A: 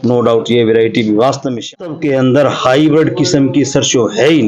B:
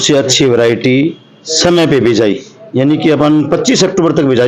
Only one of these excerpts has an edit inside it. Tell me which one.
A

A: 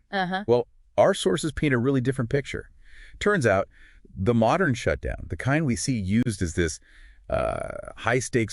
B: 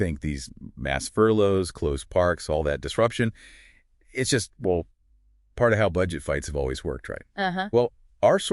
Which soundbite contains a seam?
B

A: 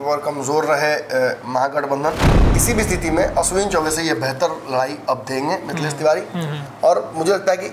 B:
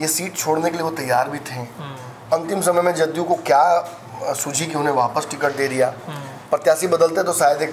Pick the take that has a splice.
A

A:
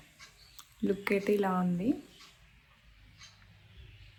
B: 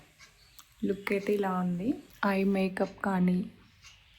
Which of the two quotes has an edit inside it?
B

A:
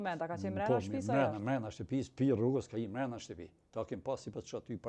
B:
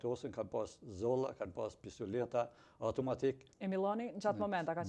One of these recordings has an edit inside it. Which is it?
B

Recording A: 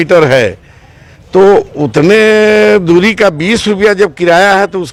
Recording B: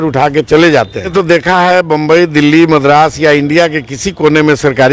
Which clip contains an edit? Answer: B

